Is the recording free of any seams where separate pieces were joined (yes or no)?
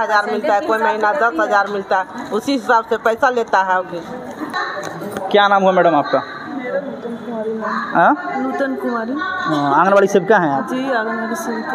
no